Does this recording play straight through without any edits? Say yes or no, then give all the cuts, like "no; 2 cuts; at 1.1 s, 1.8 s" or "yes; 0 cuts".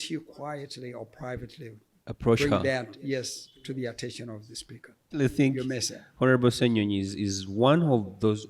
no; 1 cut; at 5.1 s